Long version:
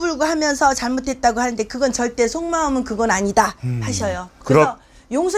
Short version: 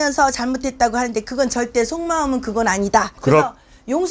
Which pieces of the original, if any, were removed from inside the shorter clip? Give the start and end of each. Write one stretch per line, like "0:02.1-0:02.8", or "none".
0:03.6-0:04.4